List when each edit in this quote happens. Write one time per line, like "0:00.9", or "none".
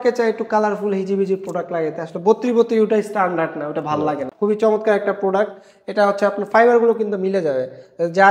0:04.3